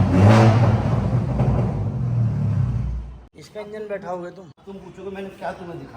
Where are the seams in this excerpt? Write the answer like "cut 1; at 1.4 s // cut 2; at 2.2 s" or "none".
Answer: none

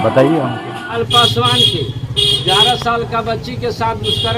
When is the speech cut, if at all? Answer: cut 1; at 0.9 s

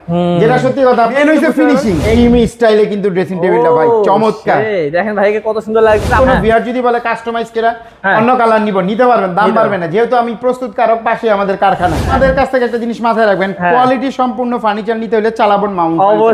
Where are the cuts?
cut 1; at 1.1 s // cut 2; at 2.2 s // cut 3; at 6.2 s // cut 4; at 12.1 s

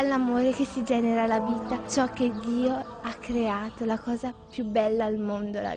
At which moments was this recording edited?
cut 1; at 1.7 s

